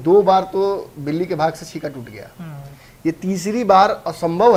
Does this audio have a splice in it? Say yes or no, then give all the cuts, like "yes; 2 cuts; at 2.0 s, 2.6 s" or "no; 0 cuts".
no; 0 cuts